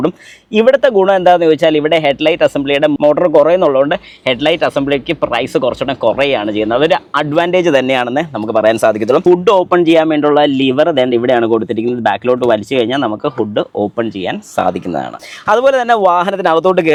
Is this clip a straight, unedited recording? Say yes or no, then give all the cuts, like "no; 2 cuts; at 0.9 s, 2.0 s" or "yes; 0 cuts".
yes; 0 cuts